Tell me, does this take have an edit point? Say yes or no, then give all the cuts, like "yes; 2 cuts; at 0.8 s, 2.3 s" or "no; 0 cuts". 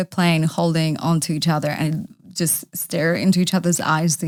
no; 0 cuts